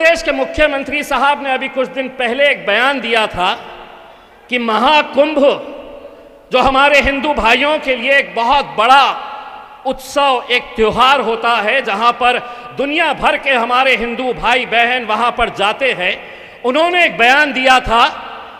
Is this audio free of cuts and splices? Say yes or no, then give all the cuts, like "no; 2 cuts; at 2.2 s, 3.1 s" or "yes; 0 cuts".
yes; 0 cuts